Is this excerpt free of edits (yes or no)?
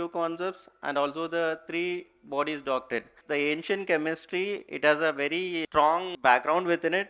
no